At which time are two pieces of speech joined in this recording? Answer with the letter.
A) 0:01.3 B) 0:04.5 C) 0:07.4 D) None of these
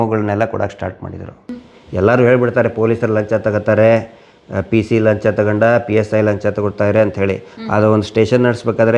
A